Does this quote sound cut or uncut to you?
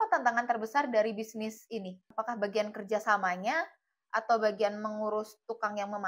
cut